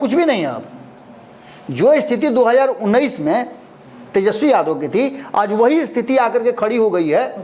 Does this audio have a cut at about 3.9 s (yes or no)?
no